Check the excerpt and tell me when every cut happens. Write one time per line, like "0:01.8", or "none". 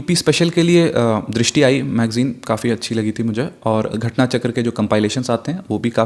none